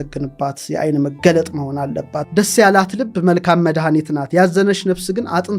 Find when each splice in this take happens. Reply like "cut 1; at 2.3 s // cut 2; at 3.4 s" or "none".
cut 1; at 2.1 s